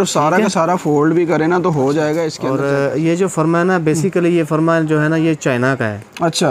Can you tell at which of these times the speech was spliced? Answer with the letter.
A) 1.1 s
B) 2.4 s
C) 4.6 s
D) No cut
B